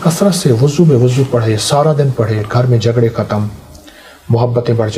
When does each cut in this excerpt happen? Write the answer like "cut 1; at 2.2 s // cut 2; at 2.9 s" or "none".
none